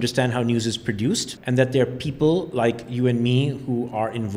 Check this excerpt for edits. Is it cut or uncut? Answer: cut